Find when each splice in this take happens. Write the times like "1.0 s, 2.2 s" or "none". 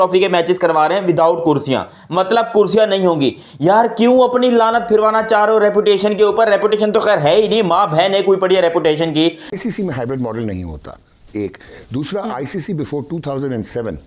9.5 s

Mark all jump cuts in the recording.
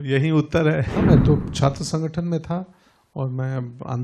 0.9 s

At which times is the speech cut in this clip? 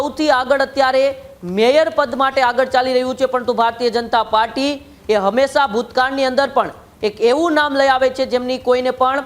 none

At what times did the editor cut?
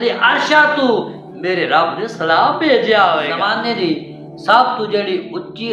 3.4 s

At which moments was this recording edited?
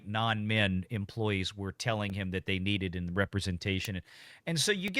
none

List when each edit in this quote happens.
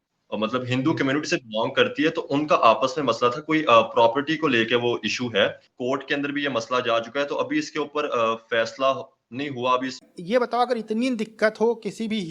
5.7 s, 10.1 s

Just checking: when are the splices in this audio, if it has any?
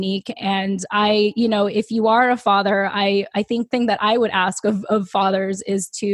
3.7 s

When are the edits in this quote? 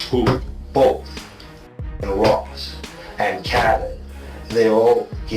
1.7 s

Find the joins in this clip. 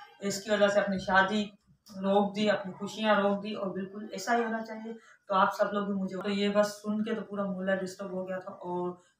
6.2 s

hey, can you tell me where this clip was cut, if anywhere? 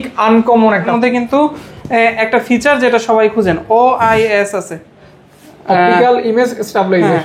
0.9 s

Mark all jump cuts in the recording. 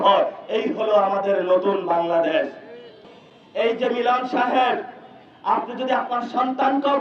3.0 s

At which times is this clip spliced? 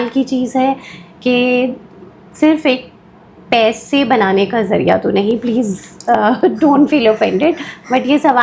none

